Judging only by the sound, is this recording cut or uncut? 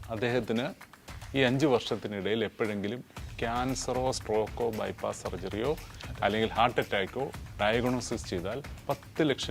uncut